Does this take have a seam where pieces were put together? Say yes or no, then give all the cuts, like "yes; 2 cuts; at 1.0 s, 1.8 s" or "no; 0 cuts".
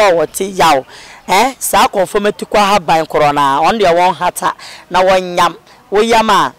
no; 0 cuts